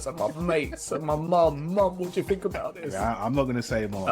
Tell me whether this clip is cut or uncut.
cut